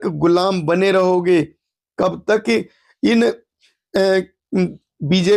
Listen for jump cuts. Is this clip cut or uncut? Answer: uncut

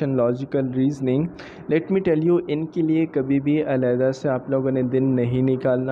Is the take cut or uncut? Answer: uncut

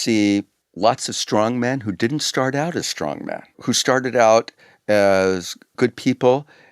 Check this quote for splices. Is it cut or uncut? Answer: cut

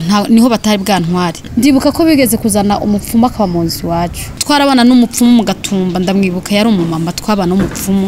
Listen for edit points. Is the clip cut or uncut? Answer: cut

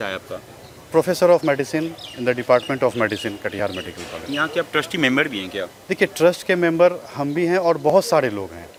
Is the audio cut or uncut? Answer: uncut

